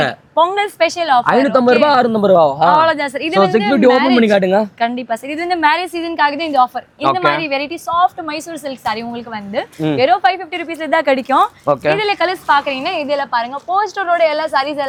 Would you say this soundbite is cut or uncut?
uncut